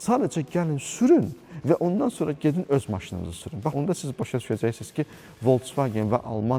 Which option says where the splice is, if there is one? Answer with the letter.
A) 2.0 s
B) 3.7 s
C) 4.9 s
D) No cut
B